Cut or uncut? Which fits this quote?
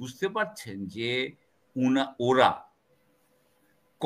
uncut